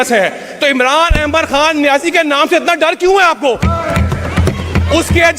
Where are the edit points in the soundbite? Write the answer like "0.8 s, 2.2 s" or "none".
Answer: none